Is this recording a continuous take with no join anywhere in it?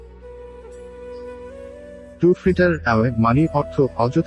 yes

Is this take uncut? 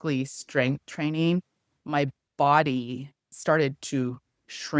no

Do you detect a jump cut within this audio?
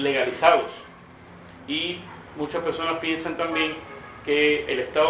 yes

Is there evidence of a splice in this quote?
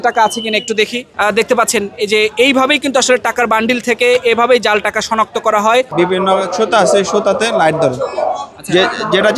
yes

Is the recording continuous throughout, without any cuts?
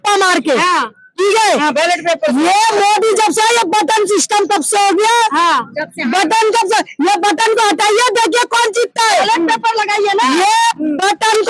yes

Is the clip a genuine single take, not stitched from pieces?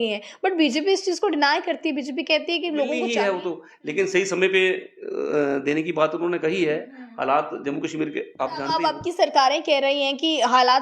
no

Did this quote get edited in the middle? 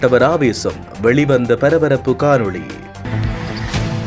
yes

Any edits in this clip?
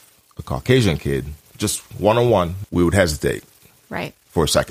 yes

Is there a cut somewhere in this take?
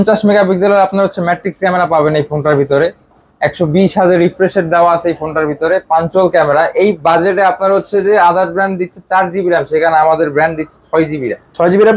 no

